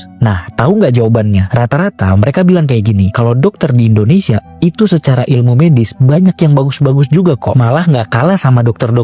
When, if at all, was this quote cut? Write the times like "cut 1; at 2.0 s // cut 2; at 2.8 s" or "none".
none